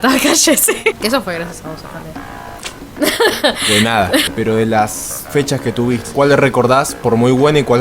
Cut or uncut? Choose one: cut